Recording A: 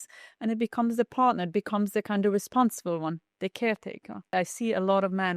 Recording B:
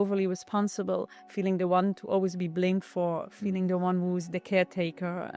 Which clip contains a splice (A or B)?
A